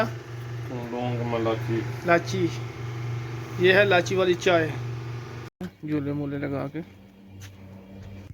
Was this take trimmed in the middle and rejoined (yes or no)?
yes